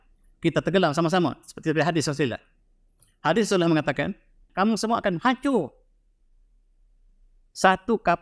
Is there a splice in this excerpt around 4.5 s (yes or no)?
yes